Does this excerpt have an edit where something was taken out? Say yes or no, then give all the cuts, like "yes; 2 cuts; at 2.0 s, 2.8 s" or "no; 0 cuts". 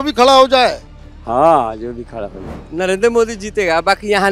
yes; 1 cut; at 2.6 s